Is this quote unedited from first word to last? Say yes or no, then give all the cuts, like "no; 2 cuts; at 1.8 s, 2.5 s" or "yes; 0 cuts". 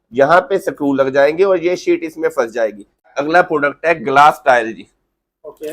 no; 1 cut; at 3.1 s